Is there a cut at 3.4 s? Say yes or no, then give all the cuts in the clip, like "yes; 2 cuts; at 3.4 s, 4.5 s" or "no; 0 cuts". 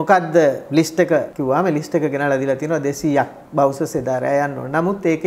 no; 1 cut; at 1.3 s